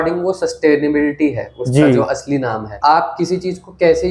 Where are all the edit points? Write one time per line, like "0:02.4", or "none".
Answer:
none